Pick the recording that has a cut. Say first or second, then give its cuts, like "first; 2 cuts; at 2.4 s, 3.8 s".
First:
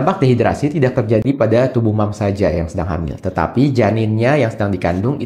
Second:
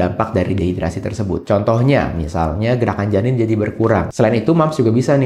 second; 1 cut; at 4.1 s